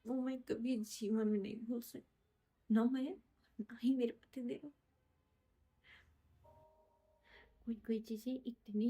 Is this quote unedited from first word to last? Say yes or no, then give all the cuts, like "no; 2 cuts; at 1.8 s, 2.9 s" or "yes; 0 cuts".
no; 1 cut; at 6.2 s